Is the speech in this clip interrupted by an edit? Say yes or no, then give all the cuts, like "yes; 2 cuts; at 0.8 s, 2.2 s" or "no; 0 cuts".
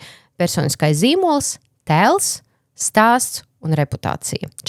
no; 0 cuts